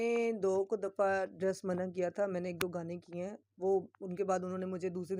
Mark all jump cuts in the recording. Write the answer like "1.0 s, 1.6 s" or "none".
none